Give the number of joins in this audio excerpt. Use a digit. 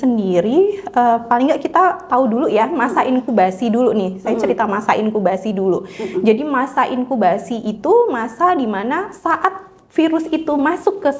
0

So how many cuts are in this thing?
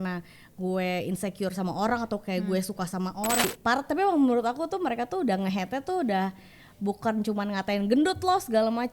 1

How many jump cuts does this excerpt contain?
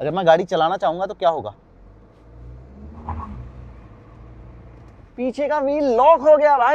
0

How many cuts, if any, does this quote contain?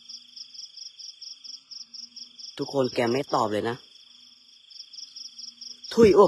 1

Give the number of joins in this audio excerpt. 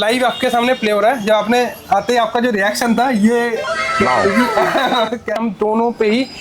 1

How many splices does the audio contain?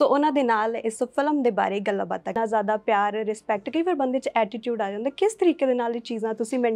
1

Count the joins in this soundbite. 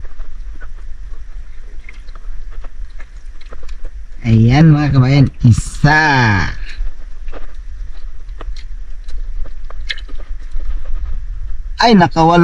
0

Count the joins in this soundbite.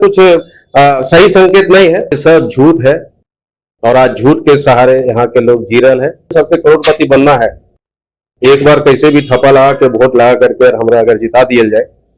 2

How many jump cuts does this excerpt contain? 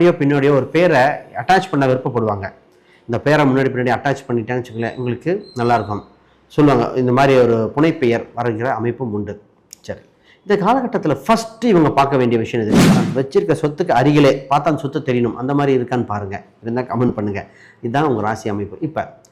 1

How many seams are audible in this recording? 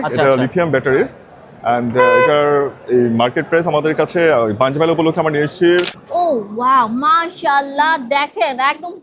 1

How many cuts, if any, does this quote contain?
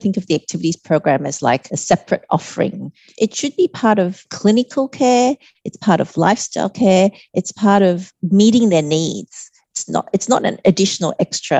4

